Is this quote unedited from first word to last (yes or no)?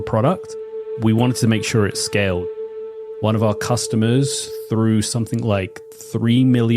no